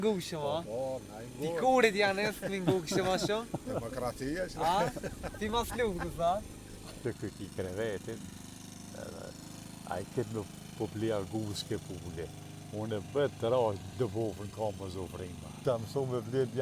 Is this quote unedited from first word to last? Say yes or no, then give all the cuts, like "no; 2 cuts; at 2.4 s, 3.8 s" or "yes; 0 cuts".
no; 2 cuts; at 7.0 s, 15.5 s